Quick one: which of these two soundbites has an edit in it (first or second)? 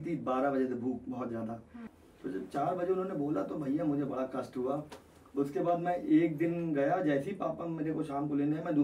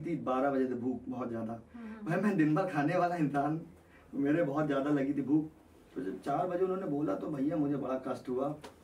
first